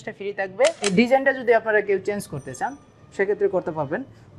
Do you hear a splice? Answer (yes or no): yes